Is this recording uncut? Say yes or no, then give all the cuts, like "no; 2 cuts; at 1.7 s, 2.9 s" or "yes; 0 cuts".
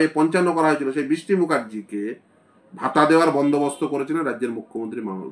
yes; 0 cuts